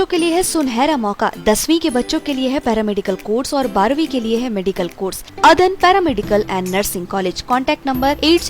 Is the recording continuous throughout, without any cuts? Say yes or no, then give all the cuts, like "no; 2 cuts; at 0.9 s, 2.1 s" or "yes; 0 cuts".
no; 1 cut; at 5.3 s